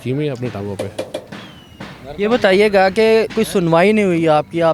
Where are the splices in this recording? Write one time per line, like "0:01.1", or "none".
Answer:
none

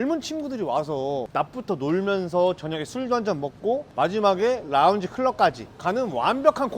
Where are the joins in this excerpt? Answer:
0:01.3

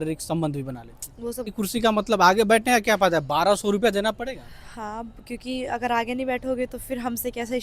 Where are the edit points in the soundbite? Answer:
0:01.5

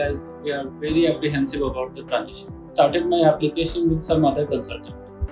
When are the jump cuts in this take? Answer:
0:02.7

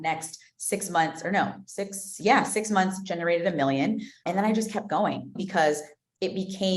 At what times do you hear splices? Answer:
0:04.2
0:05.4

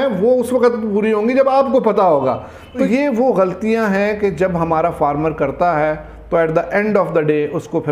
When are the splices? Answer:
0:02.8

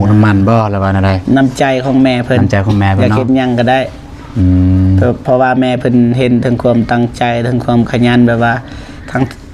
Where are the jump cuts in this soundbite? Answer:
none

